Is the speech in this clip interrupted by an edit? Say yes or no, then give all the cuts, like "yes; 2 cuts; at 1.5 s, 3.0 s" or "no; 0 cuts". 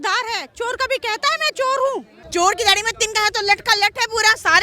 yes; 1 cut; at 2.1 s